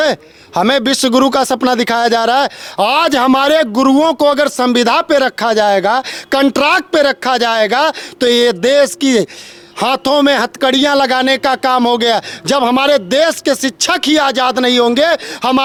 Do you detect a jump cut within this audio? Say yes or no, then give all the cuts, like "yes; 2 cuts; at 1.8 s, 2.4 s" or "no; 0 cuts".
no; 0 cuts